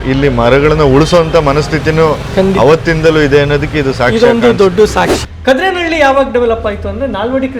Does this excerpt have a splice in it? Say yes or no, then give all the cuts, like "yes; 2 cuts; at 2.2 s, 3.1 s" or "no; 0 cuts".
yes; 1 cut; at 5.2 s